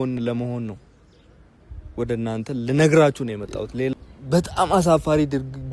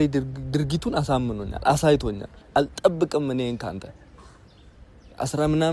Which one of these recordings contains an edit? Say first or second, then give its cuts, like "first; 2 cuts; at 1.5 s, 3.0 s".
first; 1 cut; at 3.9 s